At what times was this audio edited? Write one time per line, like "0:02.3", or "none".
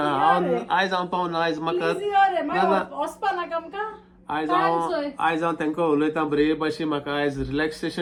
none